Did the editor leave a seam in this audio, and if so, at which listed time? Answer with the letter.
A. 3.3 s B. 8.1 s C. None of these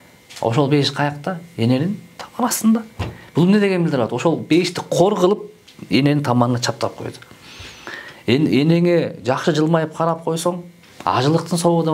C